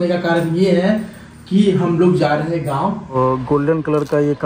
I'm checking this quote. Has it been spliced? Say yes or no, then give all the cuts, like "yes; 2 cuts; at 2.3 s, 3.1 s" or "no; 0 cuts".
yes; 1 cut; at 3.1 s